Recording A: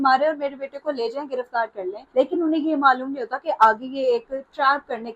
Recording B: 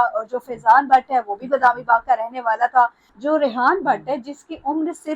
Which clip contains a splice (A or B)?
B